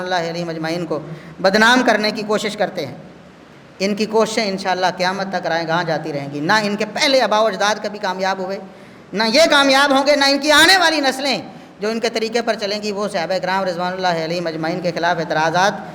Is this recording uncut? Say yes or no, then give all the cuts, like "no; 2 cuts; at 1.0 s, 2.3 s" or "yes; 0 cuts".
yes; 0 cuts